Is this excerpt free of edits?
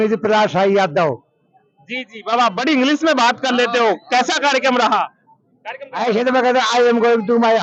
yes; 0 cuts

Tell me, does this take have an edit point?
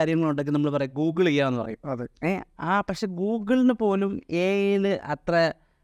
no; 0 cuts

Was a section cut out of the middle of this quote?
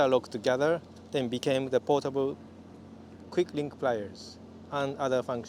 no; 0 cuts

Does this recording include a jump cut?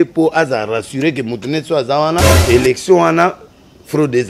yes; 1 cut; at 2.3 s

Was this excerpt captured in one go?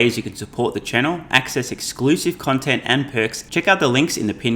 no; 1 cut; at 3.4 s

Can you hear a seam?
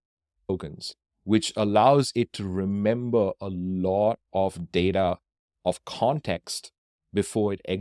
no; 0 cuts

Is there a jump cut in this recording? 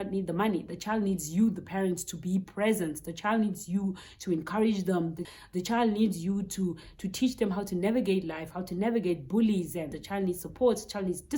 yes; 2 cuts; at 5.2 s, 10.0 s

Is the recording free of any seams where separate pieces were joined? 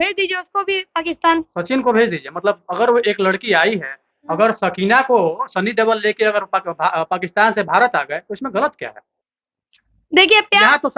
yes; 0 cuts

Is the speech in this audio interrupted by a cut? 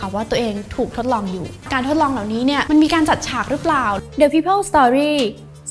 yes; 3 cuts; at 1.7 s, 2.6 s, 4.0 s

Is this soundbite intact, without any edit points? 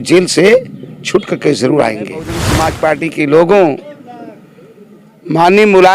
no; 1 cut; at 2.6 s

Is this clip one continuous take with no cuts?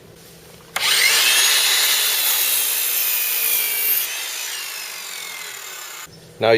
no; 1 cut; at 4.2 s

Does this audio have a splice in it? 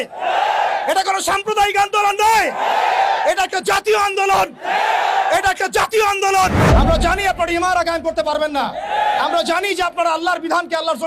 yes; 1 cut; at 6.6 s

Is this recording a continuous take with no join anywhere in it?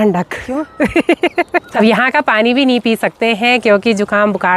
no; 1 cut; at 1.7 s

